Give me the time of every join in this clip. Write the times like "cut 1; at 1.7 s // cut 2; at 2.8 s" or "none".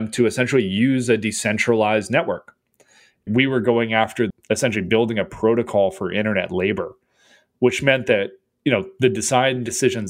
cut 1; at 3.2 s // cut 2; at 4.4 s

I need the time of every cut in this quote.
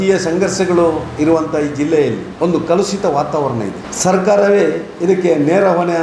cut 1; at 2.3 s // cut 2; at 3.8 s

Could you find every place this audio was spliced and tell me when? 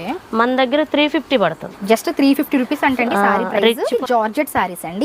cut 1; at 1.7 s // cut 2; at 3.9 s

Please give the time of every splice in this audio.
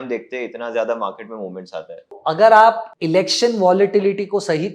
cut 1; at 2.2 s // cut 2; at 2.9 s

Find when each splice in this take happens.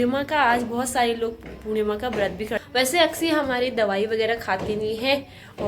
cut 1; at 2.6 s

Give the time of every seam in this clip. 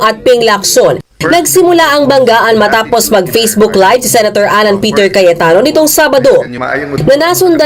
none

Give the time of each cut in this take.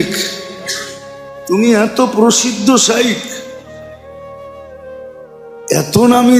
cut 1; at 3.3 s // cut 2; at 5.7 s

